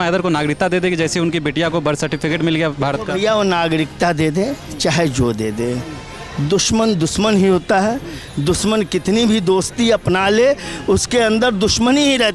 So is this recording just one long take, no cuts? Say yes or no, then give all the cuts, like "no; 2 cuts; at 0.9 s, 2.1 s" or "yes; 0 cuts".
yes; 0 cuts